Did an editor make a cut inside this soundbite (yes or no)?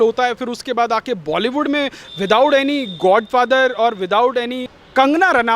yes